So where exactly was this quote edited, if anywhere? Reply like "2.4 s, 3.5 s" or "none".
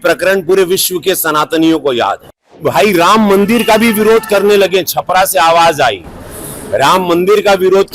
2.6 s